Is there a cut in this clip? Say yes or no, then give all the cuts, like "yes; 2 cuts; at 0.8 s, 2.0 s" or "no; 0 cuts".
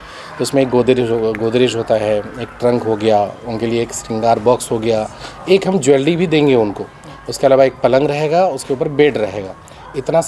no; 0 cuts